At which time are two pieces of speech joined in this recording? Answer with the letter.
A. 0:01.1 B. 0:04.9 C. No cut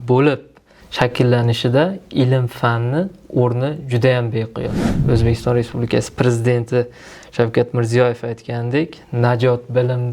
B